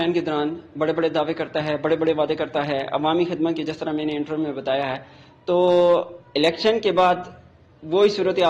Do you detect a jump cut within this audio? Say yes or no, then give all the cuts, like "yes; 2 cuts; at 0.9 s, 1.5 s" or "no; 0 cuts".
no; 0 cuts